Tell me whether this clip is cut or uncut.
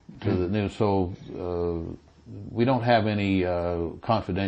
uncut